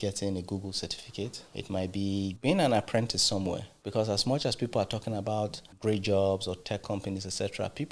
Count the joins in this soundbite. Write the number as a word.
four